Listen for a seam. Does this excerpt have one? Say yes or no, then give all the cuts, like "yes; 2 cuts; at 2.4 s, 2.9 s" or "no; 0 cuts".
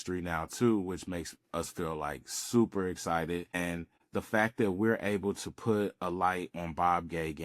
yes; 1 cut; at 3.5 s